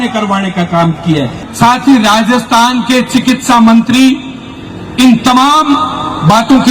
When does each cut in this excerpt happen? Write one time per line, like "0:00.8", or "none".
0:01.4